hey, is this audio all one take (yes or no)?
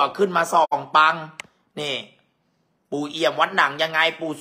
yes